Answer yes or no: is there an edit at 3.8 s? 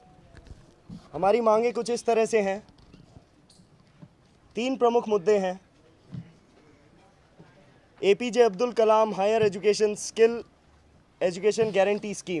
no